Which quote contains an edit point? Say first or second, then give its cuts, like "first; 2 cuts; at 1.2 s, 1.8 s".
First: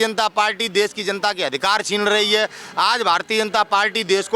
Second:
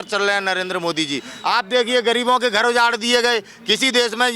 second; 1 cut; at 1.3 s